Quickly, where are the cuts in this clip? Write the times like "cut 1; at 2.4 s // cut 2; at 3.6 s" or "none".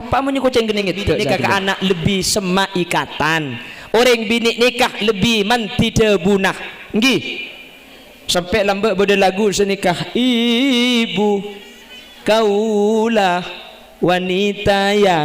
cut 1; at 1.2 s

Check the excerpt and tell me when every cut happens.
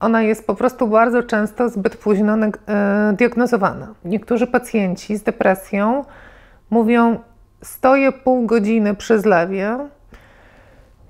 cut 1; at 4.0 s

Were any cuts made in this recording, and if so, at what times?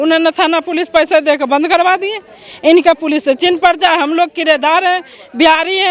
none

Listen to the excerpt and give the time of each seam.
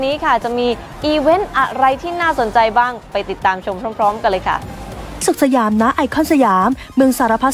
cut 1; at 5.2 s

